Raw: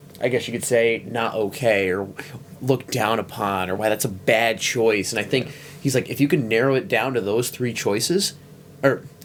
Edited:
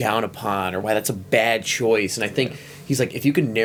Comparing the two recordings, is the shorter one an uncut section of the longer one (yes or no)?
yes